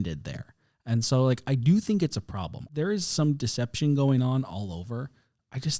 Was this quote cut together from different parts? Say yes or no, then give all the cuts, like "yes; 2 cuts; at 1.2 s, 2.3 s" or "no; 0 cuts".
yes; 1 cut; at 2.7 s